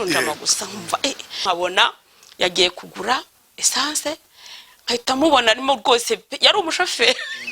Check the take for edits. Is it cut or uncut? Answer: cut